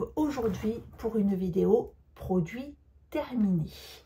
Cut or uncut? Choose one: uncut